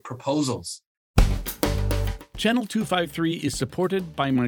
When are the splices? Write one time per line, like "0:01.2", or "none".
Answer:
0:01.1